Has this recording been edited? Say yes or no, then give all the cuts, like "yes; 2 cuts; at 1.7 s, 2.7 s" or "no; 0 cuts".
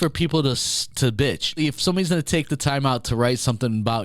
yes; 1 cut; at 1.6 s